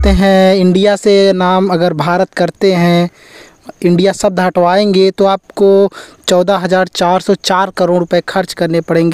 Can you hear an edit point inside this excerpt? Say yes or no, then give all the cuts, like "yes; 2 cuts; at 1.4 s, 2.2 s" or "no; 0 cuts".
no; 0 cuts